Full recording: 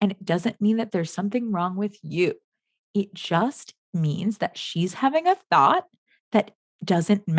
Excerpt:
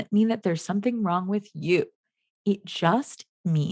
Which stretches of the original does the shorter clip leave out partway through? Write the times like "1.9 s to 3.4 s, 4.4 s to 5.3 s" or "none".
none